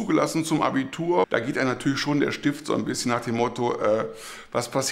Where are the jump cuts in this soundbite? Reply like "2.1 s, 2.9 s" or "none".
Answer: 1.2 s